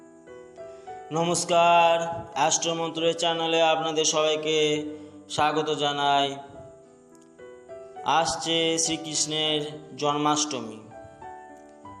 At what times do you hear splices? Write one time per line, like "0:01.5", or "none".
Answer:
0:01.1